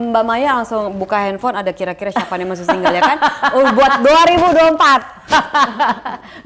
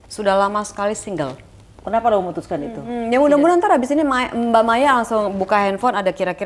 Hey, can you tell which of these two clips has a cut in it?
second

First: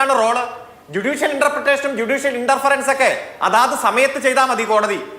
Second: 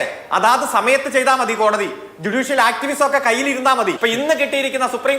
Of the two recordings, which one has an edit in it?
second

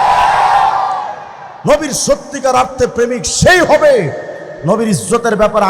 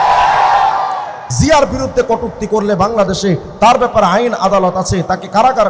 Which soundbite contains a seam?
second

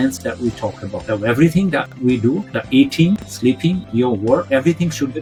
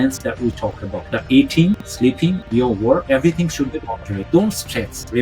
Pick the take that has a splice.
second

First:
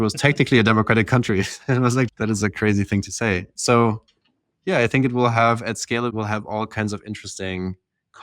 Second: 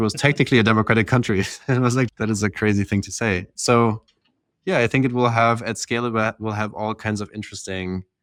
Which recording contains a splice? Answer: first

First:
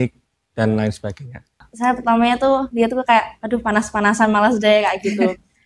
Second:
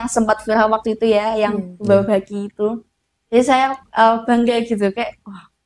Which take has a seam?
first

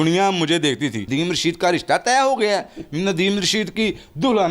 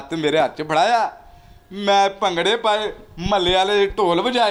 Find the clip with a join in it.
first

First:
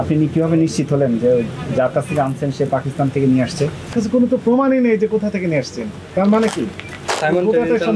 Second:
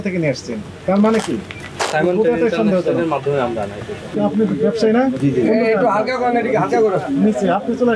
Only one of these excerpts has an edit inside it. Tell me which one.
first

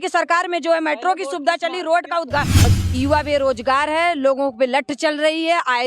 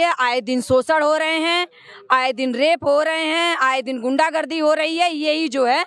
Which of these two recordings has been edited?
first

